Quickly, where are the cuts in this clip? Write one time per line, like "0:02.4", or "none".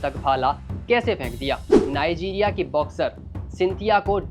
0:01.8